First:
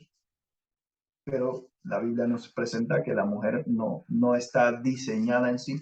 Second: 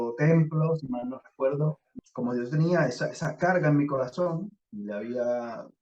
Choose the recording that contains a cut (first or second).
second